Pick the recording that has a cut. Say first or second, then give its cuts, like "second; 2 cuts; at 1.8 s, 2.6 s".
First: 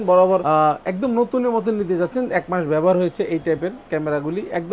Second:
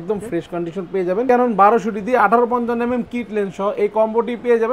second; 1 cut; at 1.2 s